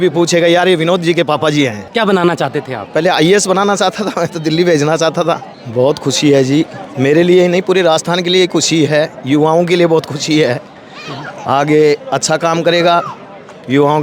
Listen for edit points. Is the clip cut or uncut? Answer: cut